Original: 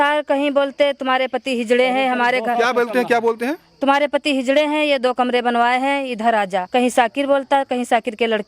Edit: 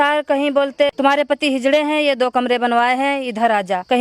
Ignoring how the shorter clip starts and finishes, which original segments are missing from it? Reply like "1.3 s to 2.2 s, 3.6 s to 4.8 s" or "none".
0.9 s to 3.8 s